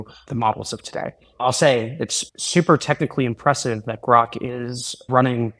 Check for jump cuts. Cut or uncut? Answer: cut